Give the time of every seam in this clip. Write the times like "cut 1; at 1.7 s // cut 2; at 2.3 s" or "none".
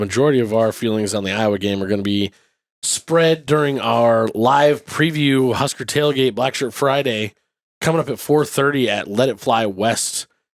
none